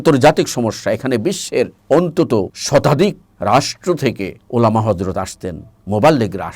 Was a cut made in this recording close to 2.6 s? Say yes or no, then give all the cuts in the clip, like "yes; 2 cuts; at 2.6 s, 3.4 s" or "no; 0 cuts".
yes; 4 cuts; at 1.8 s, 2.6 s, 3.3 s, 4.4 s